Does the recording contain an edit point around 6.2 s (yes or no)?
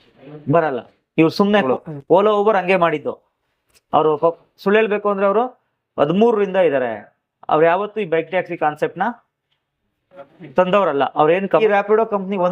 no